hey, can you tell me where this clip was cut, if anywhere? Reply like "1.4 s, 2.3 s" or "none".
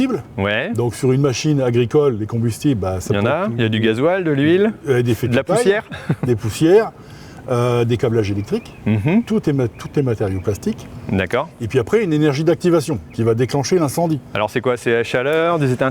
none